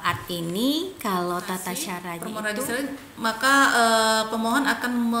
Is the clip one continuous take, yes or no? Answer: no